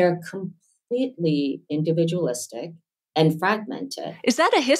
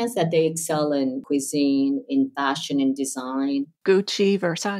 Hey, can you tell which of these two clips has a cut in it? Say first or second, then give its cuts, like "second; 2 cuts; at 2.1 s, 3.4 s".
second; 2 cuts; at 1.2 s, 3.7 s